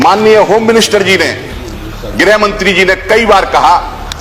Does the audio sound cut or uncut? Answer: uncut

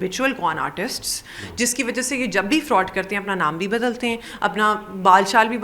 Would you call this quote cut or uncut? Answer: uncut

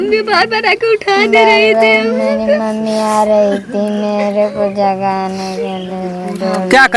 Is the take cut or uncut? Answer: uncut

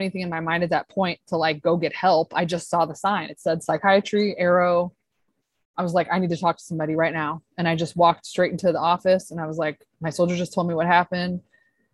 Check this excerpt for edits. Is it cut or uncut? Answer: uncut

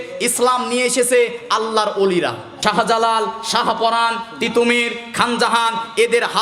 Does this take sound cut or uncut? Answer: cut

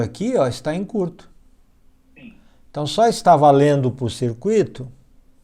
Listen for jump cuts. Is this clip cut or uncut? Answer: uncut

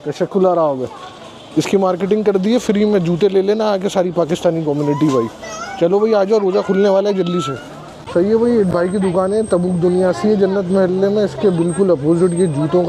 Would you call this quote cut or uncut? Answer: uncut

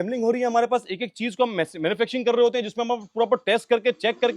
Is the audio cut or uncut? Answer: uncut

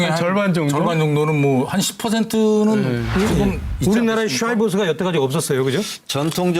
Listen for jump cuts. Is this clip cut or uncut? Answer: cut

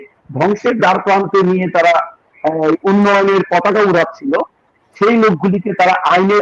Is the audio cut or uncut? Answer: uncut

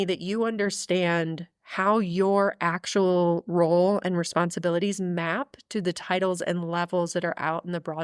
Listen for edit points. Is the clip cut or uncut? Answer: uncut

